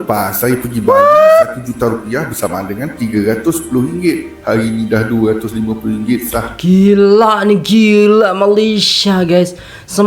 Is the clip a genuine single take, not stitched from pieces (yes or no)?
yes